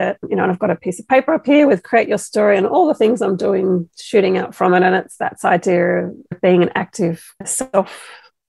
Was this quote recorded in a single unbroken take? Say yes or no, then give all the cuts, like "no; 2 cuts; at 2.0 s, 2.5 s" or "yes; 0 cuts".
no; 2 cuts; at 6.4 s, 7.4 s